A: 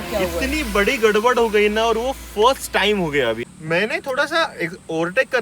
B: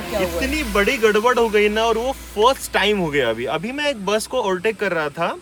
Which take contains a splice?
A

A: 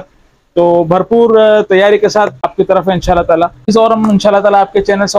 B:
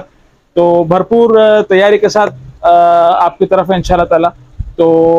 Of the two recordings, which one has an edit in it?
A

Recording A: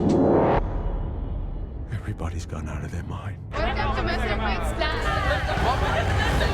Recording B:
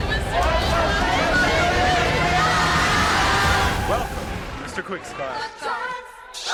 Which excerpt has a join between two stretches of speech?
A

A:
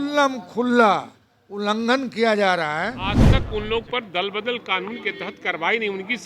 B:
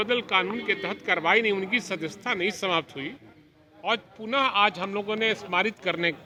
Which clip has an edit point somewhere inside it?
A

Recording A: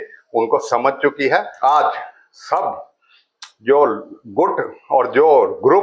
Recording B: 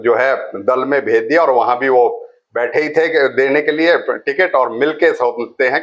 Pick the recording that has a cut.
A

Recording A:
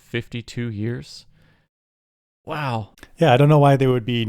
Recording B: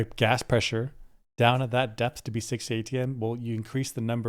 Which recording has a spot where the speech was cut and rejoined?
A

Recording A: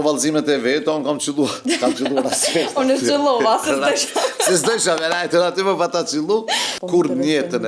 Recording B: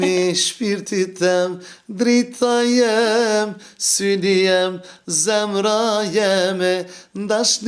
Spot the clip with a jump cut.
A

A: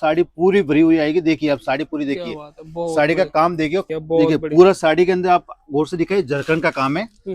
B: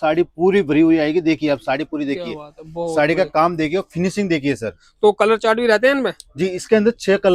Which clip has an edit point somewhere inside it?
A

